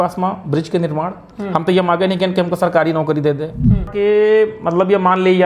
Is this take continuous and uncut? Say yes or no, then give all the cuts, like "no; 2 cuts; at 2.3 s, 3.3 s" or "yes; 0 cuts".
no; 1 cut; at 3.9 s